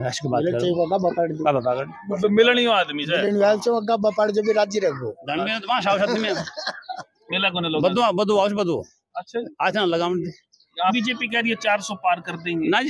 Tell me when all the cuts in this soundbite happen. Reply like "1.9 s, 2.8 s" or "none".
10.9 s